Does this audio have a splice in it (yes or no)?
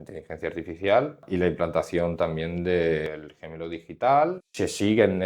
yes